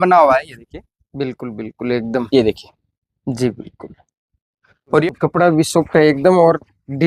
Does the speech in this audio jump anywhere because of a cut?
yes; 1 cut; at 5.0 s

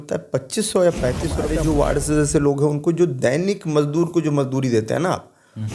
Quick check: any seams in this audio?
yes; 1 cut; at 1.5 s

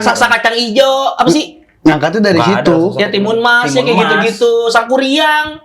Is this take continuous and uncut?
yes; 0 cuts

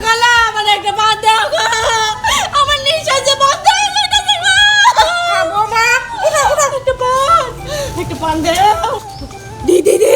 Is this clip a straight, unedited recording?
yes; 0 cuts

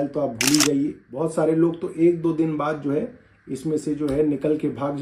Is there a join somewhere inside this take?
yes; 1 cut; at 1.0 s

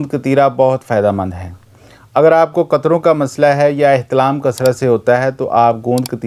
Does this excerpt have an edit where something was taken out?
no; 0 cuts

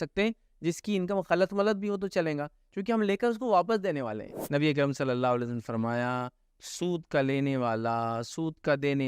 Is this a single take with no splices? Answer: no; 1 cut; at 4.3 s

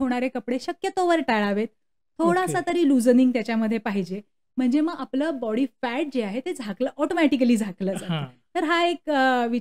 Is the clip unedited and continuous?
yes; 0 cuts

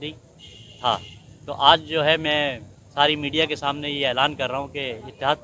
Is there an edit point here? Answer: no; 0 cuts

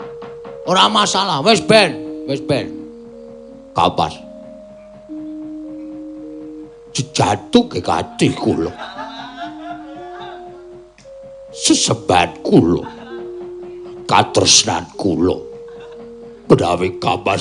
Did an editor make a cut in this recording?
yes; 1 cut; at 4.2 s

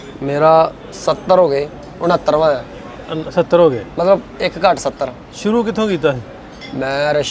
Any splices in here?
no; 0 cuts

